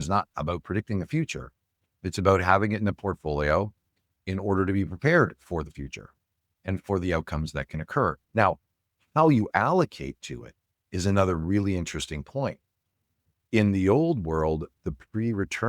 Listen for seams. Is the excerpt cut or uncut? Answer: cut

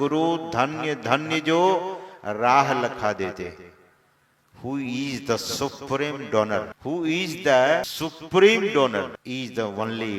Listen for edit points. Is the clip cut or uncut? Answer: cut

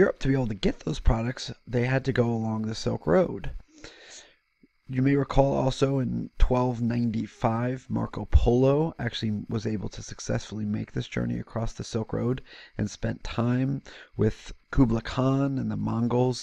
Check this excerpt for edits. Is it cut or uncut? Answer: uncut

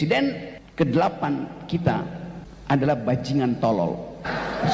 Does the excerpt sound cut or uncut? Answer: uncut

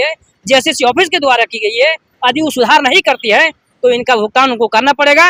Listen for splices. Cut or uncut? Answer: uncut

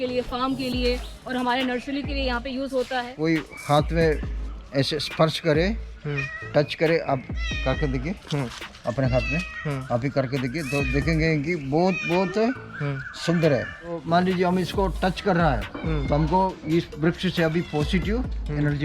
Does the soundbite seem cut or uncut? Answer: cut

